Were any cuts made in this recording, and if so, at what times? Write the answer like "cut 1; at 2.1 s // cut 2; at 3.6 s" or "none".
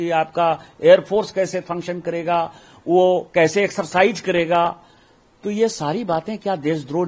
none